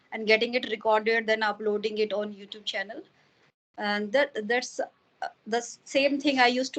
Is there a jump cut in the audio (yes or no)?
no